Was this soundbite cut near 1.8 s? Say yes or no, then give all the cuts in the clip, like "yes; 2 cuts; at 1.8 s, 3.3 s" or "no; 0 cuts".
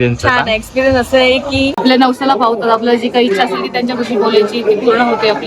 yes; 1 cut; at 1.8 s